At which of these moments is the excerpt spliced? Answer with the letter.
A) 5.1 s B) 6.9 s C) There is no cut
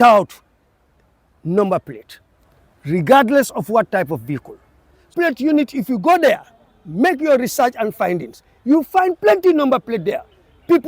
A